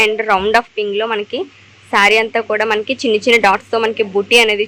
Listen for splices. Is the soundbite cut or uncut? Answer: uncut